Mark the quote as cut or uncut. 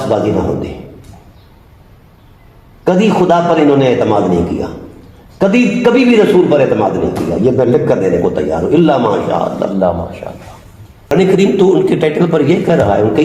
cut